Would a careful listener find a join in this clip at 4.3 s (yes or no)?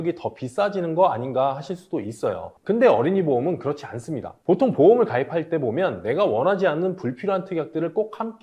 no